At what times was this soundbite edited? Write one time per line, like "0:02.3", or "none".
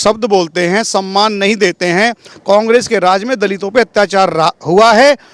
0:02.3